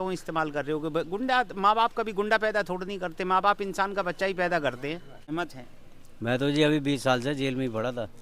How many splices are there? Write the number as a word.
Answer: one